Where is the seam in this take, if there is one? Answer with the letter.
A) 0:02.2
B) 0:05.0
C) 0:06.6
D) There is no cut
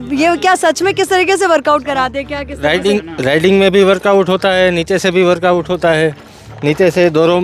D